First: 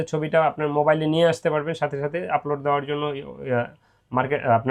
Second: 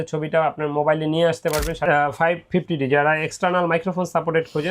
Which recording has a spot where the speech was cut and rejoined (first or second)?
second